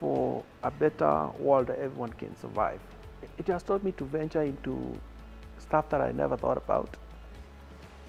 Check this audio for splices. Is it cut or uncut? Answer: uncut